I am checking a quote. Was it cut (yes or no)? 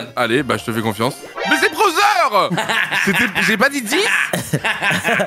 yes